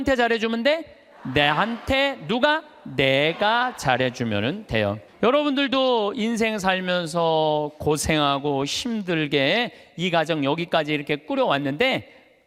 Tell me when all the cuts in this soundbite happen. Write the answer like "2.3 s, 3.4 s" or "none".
5.0 s